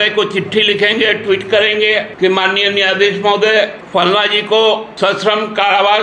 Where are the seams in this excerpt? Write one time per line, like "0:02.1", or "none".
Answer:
0:02.1
0:03.8
0:04.9